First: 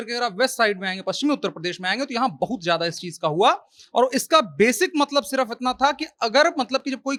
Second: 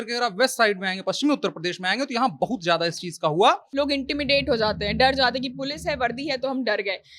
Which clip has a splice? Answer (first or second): second